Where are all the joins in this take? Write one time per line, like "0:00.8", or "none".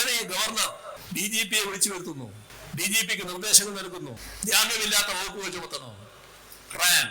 0:01.0
0:02.5
0:04.3